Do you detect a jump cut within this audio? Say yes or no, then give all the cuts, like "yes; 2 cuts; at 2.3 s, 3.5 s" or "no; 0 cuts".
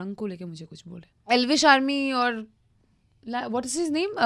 yes; 1 cut; at 1.2 s